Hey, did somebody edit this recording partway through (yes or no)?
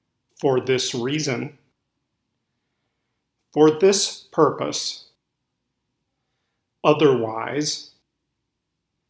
yes